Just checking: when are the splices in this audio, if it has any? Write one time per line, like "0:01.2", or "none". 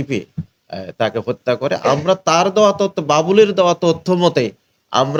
none